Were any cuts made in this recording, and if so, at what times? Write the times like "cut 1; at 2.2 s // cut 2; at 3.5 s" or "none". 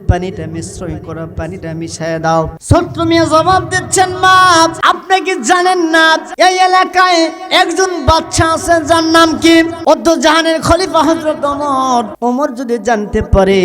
cut 1; at 2.6 s // cut 2; at 4.8 s // cut 3; at 6.3 s // cut 4; at 9.8 s // cut 5; at 12.1 s